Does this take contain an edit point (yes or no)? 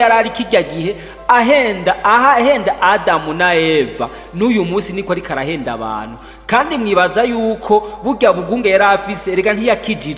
no